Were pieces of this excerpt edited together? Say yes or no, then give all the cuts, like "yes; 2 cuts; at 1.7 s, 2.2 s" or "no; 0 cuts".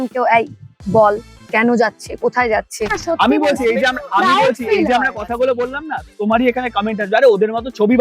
yes; 2 cuts; at 3.0 s, 6.1 s